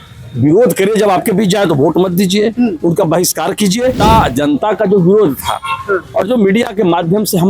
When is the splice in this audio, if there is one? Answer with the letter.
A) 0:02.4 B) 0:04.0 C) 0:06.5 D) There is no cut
B